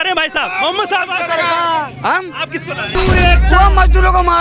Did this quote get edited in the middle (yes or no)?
yes